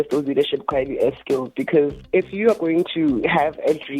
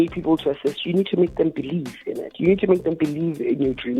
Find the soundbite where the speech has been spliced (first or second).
first